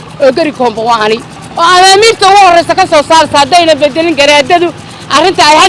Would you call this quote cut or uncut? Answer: cut